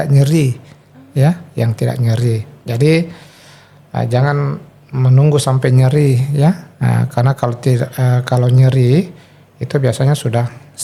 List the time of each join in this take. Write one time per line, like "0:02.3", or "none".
none